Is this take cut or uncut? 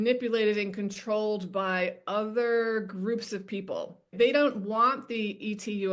uncut